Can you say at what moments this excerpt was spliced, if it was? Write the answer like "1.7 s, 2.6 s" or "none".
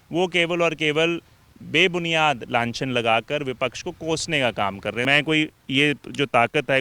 5.1 s